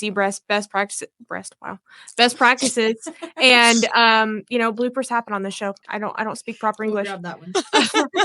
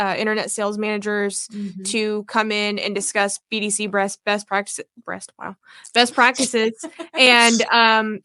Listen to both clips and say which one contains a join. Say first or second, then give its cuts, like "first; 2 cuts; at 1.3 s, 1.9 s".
first; 1 cut; at 5.8 s